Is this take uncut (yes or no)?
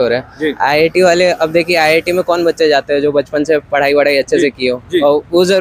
yes